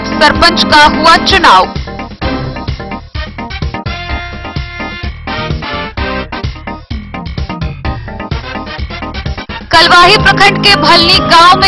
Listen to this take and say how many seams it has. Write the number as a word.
zero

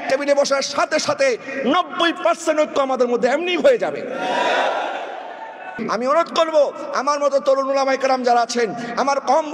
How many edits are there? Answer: one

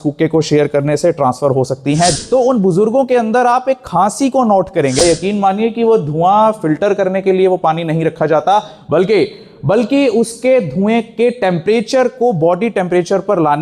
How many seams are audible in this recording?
two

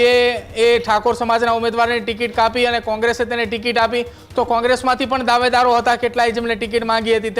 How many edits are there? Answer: zero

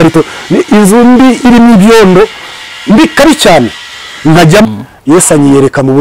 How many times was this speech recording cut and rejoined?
one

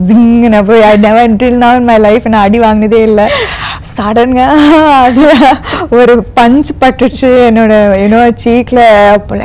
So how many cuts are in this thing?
zero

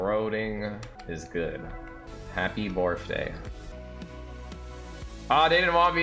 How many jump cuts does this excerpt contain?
three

